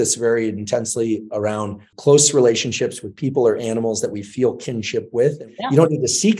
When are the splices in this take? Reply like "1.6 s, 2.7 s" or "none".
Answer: 1.9 s, 5.5 s

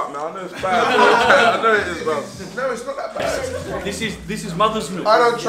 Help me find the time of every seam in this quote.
3.4 s

